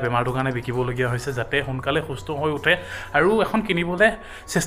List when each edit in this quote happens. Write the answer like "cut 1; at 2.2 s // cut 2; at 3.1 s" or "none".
none